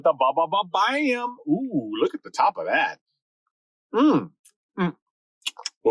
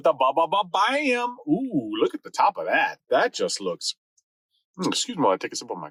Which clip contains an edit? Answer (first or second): first